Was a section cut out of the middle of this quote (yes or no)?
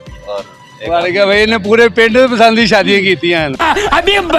no